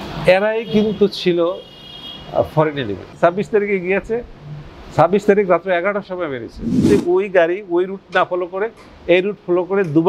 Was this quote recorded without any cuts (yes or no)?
no